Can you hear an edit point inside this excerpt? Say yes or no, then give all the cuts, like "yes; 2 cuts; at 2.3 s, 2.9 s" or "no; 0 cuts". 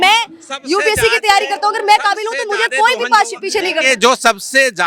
no; 0 cuts